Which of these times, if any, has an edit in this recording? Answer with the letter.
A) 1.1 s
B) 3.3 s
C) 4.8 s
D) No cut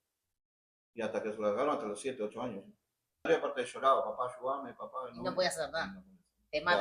B